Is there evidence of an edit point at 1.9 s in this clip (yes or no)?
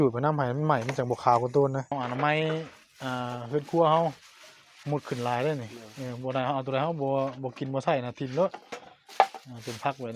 yes